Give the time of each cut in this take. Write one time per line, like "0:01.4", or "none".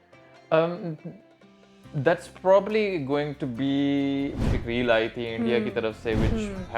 0:04.4